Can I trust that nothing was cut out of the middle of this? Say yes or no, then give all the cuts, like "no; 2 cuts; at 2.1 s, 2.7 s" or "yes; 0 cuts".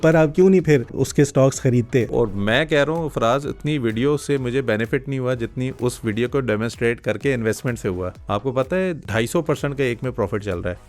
no; 4 cuts; at 1.0 s, 2.1 s, 8.2 s, 9.0 s